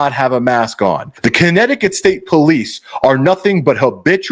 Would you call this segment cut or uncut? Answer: cut